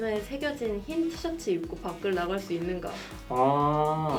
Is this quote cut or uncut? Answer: uncut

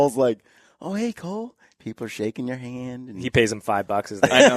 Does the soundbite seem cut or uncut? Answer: uncut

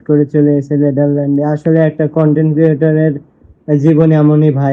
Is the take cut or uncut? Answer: uncut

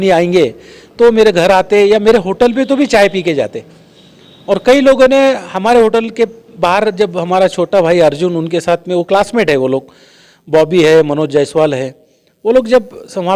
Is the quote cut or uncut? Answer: uncut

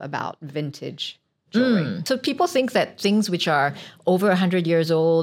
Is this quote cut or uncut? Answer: cut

